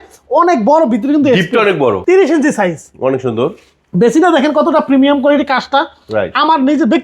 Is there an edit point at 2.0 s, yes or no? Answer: yes